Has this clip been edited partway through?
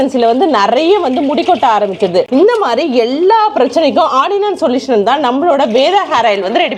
no; 0 cuts

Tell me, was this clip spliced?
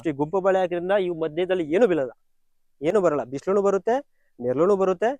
no; 0 cuts

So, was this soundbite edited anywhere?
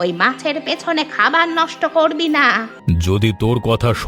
yes; 1 cut; at 2.7 s

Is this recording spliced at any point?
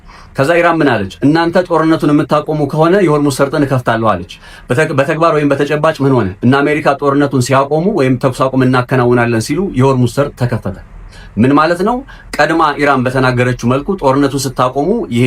no; 0 cuts

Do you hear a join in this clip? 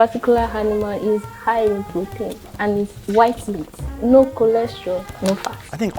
no; 0 cuts

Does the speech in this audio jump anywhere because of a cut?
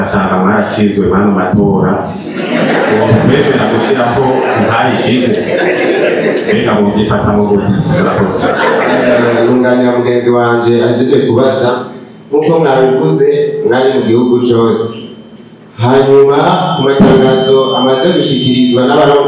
yes; 1 cut; at 8.9 s

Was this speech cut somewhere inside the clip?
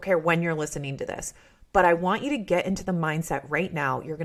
no; 0 cuts

